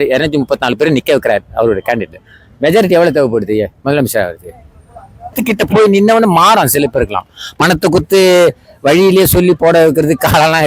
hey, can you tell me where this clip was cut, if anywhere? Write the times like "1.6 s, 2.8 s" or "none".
5.4 s